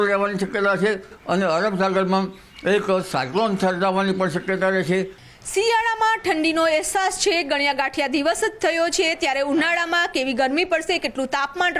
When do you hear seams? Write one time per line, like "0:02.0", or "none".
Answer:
0:01.1
0:05.2